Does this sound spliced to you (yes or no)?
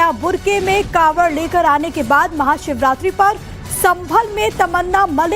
yes